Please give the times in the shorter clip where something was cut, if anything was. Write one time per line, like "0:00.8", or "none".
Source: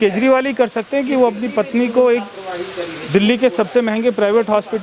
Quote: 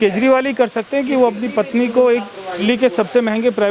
0:02.6